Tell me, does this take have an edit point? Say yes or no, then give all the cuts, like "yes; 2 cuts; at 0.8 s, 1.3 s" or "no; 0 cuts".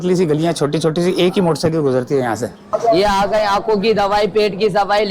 yes; 1 cut; at 2.7 s